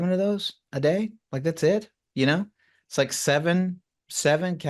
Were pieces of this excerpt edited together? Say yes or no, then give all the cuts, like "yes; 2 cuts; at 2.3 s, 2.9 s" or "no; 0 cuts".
no; 0 cuts